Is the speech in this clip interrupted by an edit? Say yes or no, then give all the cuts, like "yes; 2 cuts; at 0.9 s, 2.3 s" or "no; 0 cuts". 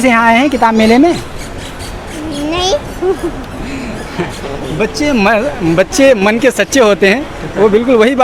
no; 0 cuts